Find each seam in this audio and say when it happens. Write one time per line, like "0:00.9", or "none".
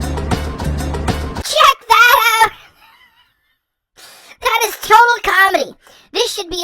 0:01.3